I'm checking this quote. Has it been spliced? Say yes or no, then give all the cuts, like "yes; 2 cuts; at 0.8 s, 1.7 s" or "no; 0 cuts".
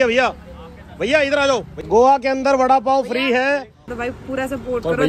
yes; 2 cuts; at 1.7 s, 3.9 s